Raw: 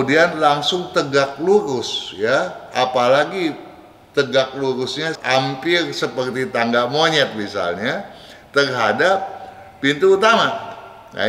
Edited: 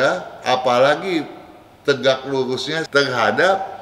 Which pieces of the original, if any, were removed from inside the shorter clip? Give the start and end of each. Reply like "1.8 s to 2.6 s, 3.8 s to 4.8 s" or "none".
5.1 s to 8.4 s